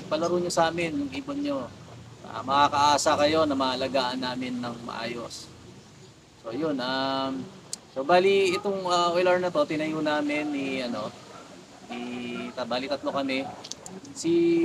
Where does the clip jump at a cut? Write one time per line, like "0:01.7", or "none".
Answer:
none